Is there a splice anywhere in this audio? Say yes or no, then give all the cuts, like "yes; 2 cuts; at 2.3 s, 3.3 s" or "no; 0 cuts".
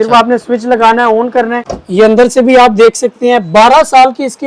yes; 1 cut; at 1.7 s